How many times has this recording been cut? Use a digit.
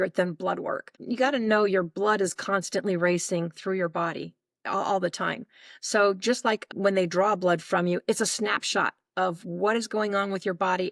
2